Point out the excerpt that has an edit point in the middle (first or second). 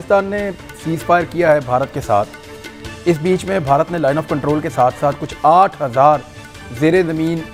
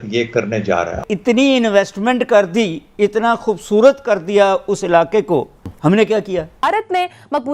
second